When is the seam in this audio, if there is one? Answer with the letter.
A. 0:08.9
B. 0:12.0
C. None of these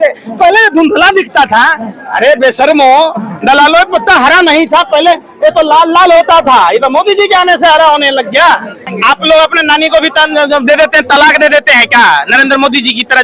A